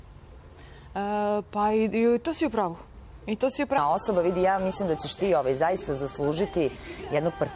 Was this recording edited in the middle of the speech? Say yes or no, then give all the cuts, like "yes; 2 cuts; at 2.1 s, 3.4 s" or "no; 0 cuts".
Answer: yes; 1 cut; at 3.8 s